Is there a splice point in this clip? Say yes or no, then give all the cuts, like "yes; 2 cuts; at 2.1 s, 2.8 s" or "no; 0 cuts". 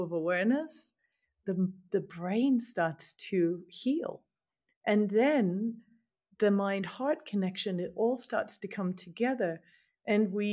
no; 0 cuts